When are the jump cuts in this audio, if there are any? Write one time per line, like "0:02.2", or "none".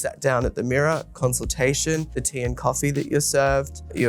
0:02.2